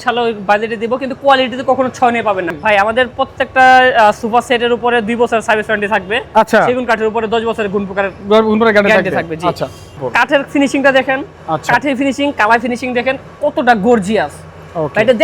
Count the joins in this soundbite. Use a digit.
2